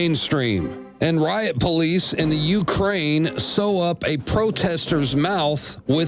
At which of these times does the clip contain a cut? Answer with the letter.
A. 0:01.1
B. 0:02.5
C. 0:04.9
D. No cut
B